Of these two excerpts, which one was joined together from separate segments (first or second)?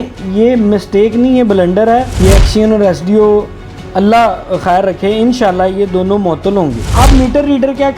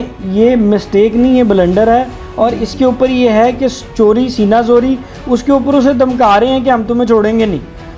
first